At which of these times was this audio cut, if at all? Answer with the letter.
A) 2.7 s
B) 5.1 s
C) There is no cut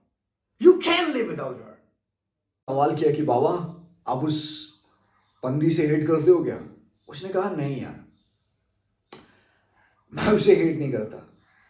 A